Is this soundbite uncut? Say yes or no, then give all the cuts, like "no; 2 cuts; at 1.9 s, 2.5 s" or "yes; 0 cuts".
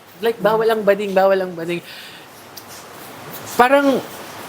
yes; 0 cuts